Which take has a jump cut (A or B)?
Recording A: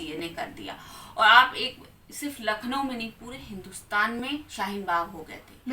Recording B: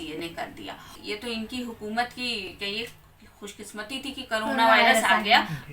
B